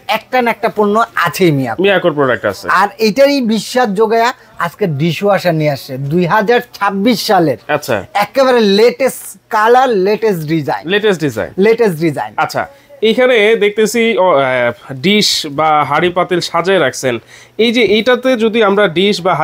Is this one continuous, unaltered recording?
yes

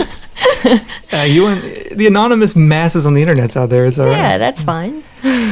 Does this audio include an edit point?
yes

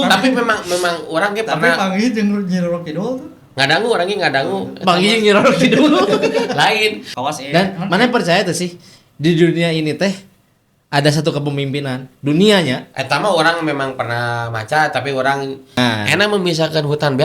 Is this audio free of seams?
no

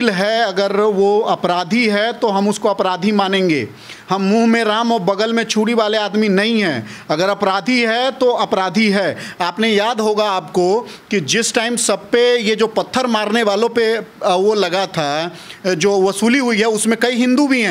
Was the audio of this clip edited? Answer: no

